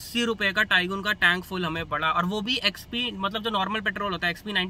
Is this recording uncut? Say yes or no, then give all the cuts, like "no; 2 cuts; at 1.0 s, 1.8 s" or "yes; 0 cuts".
yes; 0 cuts